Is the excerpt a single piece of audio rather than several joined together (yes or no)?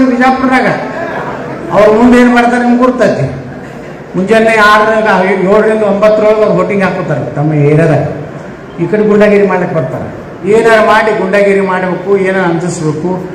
no